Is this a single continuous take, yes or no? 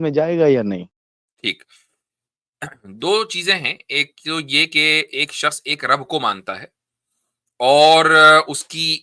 yes